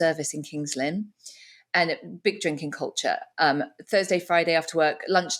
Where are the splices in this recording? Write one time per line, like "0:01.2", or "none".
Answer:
none